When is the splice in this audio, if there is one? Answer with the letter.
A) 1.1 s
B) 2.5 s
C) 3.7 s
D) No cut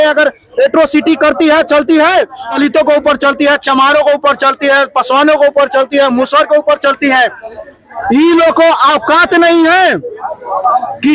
B